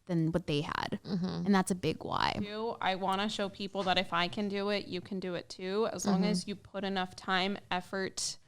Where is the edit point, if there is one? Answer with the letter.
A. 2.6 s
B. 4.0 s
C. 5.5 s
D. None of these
A